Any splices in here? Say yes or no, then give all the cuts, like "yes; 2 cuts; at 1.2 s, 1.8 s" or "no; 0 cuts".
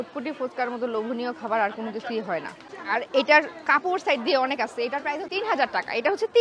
yes; 1 cut; at 2.7 s